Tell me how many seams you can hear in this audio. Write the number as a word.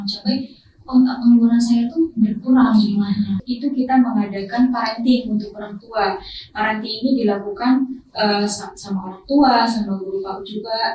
one